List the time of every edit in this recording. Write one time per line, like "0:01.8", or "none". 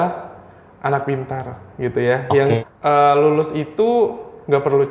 0:02.6